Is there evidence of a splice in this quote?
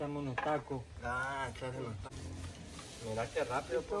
yes; 1 cut; at 2.0 s

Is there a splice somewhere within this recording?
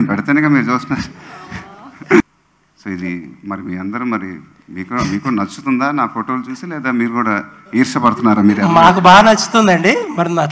yes; 1 cut; at 2.2 s

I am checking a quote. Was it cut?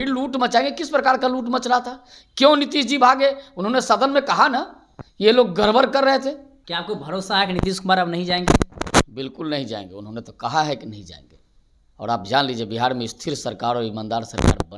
yes; 1 cut; at 6.5 s

